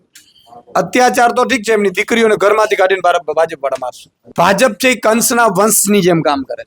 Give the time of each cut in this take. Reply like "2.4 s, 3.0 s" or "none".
4.2 s